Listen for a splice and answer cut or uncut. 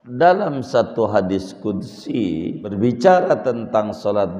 cut